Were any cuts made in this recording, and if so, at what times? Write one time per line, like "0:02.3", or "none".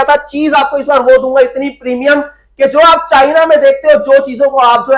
none